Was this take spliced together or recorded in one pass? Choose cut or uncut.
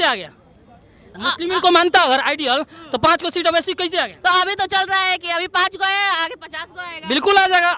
uncut